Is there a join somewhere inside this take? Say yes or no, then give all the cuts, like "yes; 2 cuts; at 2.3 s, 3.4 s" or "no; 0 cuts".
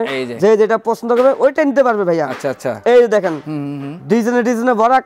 no; 0 cuts